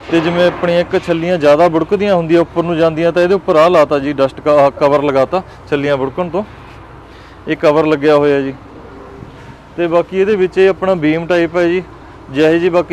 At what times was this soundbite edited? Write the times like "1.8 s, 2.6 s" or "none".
none